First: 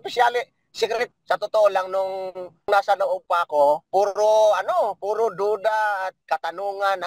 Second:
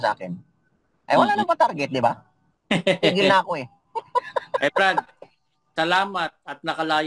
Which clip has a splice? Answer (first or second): first